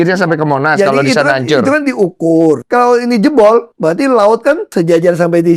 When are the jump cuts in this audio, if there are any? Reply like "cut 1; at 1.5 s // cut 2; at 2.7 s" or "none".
cut 1; at 2.6 s // cut 2; at 3.7 s // cut 3; at 4.7 s